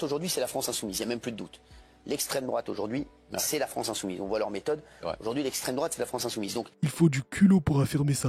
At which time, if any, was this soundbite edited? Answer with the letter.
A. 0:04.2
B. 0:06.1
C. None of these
C